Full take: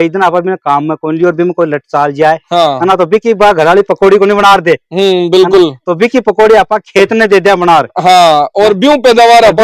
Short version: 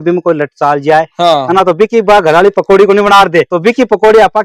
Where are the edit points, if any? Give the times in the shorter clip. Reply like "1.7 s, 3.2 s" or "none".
3.5 s